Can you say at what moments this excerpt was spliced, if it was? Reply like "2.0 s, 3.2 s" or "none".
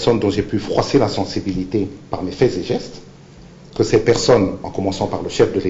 none